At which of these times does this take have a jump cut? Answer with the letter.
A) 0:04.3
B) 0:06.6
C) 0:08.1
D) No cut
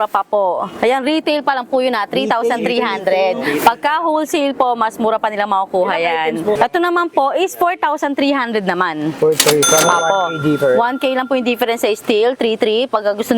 B